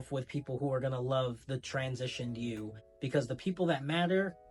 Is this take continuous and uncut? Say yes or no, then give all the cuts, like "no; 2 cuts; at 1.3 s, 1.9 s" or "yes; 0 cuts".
yes; 0 cuts